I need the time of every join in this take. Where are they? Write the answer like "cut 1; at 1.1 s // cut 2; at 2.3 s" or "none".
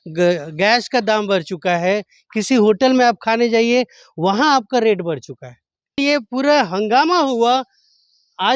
cut 1; at 6.0 s